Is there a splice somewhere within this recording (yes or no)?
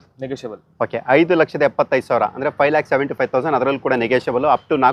no